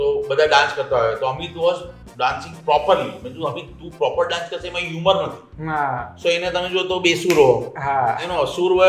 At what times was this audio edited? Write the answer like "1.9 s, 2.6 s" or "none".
none